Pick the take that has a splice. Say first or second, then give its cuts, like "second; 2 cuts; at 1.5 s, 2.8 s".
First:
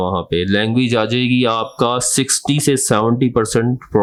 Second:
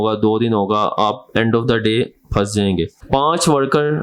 second; 1 cut; at 3.0 s